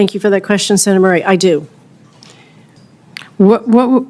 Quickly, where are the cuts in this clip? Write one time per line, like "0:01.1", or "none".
0:02.8